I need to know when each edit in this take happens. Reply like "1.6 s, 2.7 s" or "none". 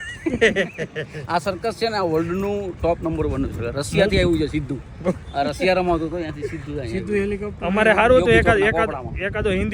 none